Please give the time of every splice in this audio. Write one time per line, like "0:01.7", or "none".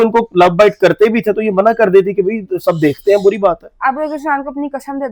none